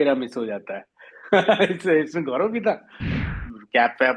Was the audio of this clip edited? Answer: yes; 1 cut; at 3.2 s

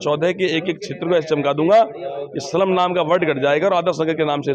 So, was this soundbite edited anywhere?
no; 0 cuts

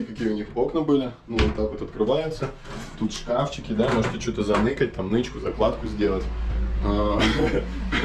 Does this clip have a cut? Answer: no; 0 cuts

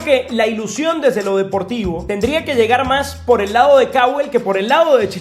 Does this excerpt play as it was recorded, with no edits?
no; 1 cut; at 2.0 s

